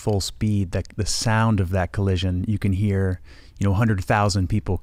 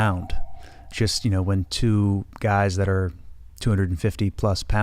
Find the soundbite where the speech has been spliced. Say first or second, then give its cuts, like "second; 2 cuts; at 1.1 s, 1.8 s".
second; 1 cut; at 0.9 s